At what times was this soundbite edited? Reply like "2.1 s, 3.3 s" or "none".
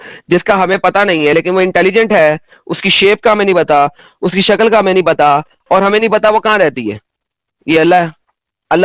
none